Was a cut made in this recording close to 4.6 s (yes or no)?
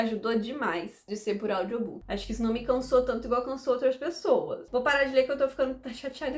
yes